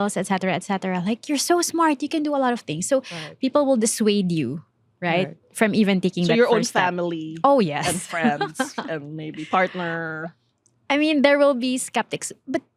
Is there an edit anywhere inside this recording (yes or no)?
no